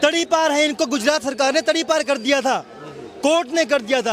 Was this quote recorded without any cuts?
yes; 0 cuts

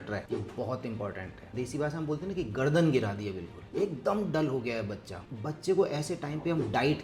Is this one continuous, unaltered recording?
no; 2 cuts; at 1.5 s, 5.2 s

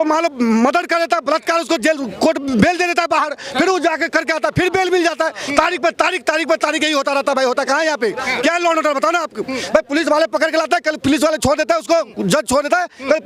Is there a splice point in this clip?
no; 0 cuts

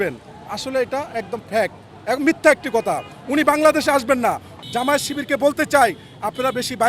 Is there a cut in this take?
yes; 1 cut; at 4.5 s

